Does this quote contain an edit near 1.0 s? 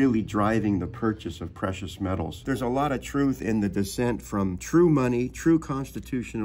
no; 2 cuts; at 2.3 s, 4.6 s

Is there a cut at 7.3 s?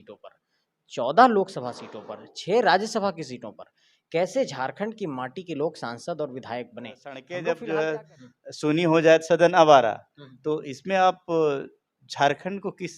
yes; 1 cut; at 7.3 s

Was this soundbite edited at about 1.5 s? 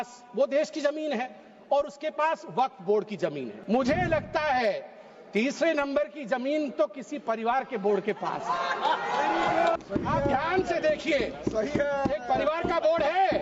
no; 2 cuts; at 3.5 s, 9.8 s

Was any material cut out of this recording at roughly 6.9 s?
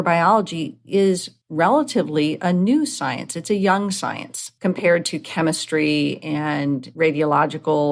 yes; 2 cuts; at 1.4 s, 6.9 s

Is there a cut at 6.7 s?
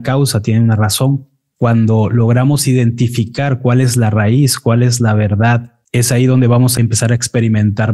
yes; 2 cuts; at 5.8 s, 6.7 s

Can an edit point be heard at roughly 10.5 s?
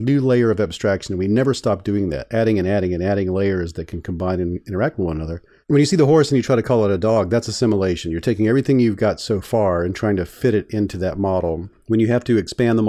no; 0 cuts

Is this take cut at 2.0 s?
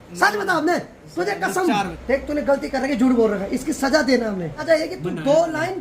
yes; 2 cuts; at 2.0 s, 4.6 s

